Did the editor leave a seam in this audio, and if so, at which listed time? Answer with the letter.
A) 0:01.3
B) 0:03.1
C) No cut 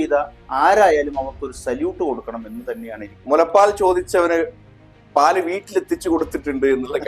B